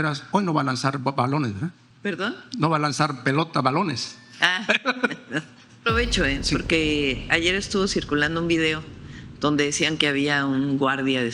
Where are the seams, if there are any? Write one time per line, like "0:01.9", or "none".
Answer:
0:01.9
0:05.8